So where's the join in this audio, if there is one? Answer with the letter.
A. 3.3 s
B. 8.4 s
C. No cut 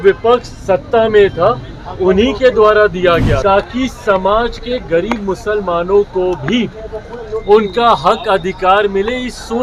A